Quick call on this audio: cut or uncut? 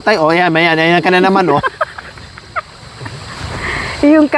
uncut